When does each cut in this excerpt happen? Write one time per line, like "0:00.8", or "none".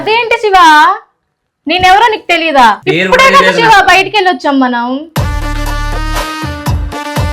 0:02.8